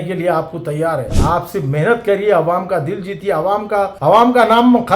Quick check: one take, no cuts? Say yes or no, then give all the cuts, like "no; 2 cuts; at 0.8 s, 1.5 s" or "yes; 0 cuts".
no; 1 cut; at 1.2 s